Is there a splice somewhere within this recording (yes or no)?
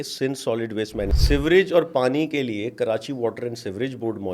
yes